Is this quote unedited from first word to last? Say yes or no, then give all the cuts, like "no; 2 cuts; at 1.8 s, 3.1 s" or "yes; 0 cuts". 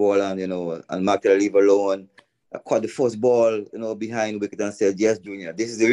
yes; 0 cuts